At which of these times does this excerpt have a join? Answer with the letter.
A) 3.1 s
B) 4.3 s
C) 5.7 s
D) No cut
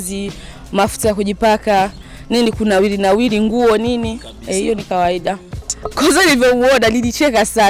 C